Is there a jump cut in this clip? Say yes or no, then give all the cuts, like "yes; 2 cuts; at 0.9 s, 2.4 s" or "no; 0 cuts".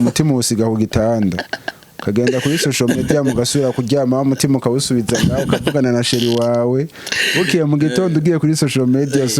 no; 0 cuts